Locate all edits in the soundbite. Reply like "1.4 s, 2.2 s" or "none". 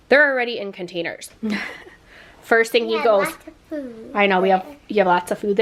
1.2 s